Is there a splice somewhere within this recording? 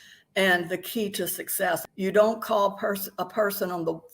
yes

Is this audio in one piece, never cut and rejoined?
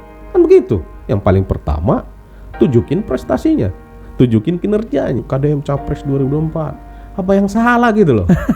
no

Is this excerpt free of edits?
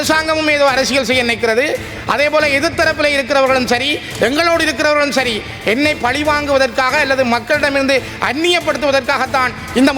yes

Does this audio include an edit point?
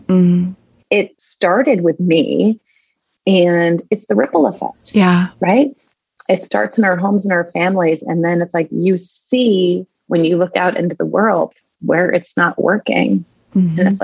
no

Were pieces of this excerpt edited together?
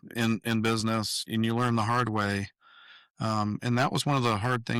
no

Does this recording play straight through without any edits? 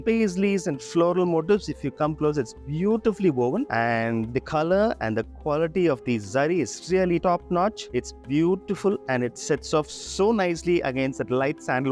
yes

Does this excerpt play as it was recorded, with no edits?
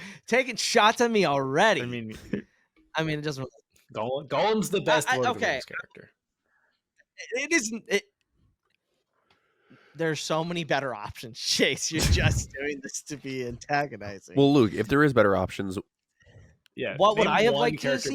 yes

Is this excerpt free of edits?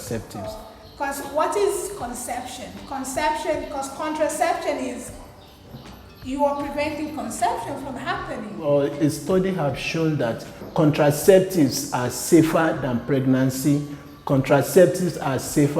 no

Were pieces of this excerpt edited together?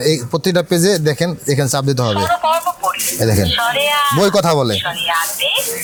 no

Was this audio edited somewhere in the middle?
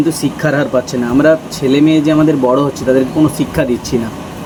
no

